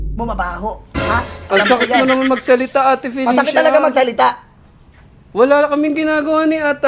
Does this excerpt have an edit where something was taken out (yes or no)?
no